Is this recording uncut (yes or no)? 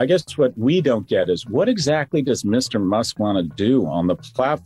yes